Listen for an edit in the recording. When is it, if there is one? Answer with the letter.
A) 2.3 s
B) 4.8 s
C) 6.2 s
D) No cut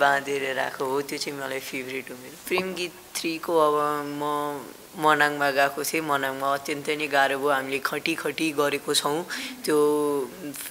A